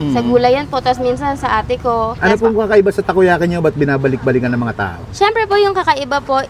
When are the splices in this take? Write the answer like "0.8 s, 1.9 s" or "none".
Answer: 2.2 s